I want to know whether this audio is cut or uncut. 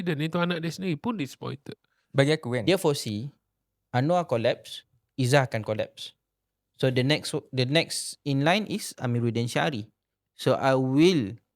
cut